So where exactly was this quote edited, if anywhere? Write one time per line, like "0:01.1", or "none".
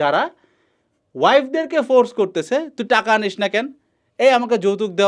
none